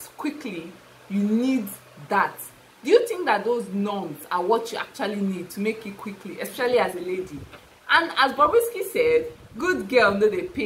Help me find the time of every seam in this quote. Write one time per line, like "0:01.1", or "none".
none